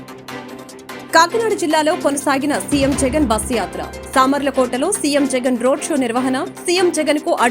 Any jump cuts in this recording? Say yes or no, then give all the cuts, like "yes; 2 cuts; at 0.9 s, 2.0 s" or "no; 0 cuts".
yes; 1 cut; at 1.1 s